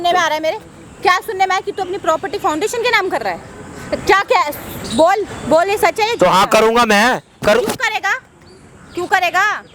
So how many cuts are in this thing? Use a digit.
0